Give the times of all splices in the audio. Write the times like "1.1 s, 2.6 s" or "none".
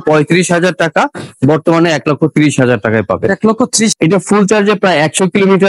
3.9 s